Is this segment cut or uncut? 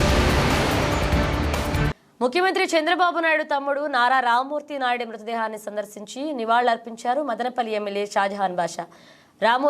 cut